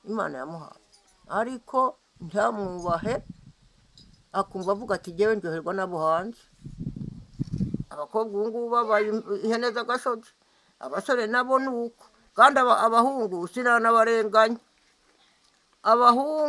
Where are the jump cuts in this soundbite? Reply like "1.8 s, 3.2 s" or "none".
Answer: 7.9 s